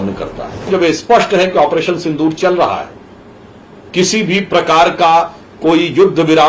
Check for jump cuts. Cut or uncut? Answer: cut